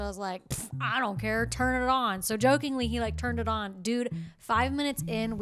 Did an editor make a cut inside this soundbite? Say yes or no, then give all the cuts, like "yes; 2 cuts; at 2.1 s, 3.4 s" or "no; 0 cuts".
no; 0 cuts